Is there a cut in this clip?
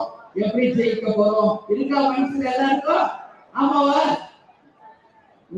no; 0 cuts

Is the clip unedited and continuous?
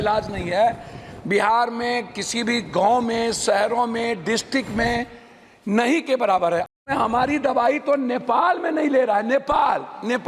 no; 1 cut; at 6.7 s

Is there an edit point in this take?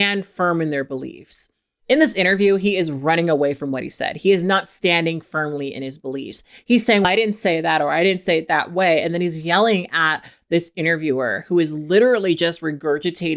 no; 0 cuts

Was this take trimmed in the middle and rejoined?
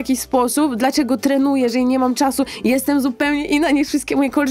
no; 0 cuts

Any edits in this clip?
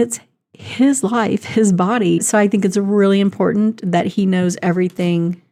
no; 0 cuts

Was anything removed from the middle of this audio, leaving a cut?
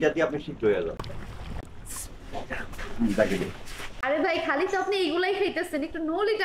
yes; 2 cuts; at 1.6 s, 3.9 s

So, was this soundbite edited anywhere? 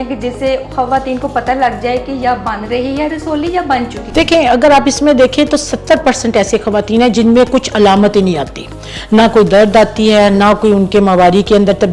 yes; 1 cut; at 4.0 s

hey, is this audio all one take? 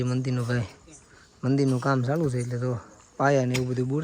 yes; 0 cuts

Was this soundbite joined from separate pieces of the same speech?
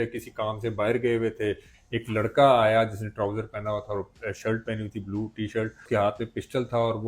yes; 2 cuts; at 1.7 s, 5.8 s

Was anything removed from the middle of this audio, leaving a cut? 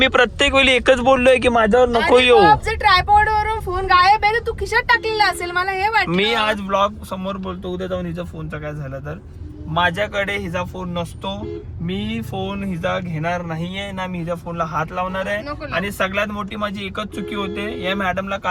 no; 0 cuts

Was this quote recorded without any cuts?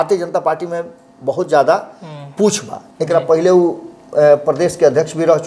yes; 0 cuts

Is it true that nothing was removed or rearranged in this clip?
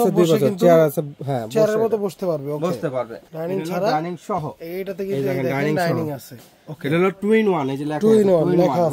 no; 1 cut; at 3.2 s

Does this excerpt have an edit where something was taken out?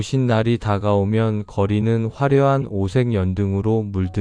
no; 0 cuts

